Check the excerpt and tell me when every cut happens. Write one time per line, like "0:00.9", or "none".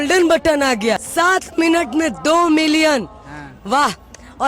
0:01.0